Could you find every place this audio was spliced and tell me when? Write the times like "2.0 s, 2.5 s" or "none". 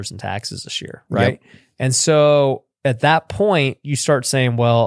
none